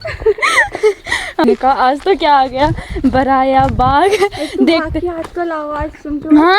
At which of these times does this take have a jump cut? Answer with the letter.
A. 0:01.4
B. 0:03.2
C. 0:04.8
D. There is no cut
A